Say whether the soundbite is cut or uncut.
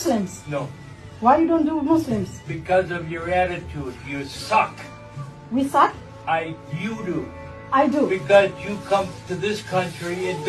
uncut